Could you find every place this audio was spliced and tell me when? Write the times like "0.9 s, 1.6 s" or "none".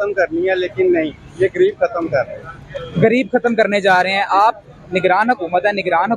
none